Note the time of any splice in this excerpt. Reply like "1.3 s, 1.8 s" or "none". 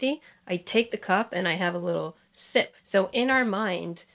2.8 s